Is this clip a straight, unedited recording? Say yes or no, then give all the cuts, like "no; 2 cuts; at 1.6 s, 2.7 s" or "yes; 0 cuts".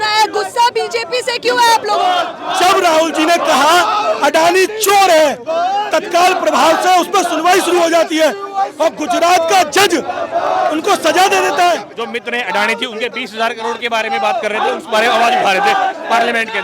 no; 2 cuts; at 2.4 s, 11.9 s